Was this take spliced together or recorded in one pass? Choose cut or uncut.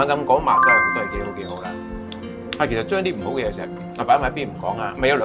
uncut